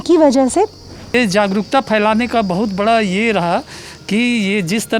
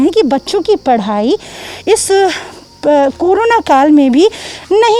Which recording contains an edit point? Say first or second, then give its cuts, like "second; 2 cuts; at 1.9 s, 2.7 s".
first; 1 cut; at 1.1 s